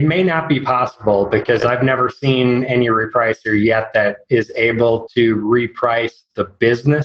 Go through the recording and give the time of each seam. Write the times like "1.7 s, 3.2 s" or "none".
none